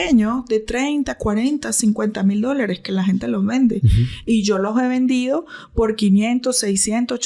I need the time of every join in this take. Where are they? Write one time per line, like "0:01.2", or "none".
none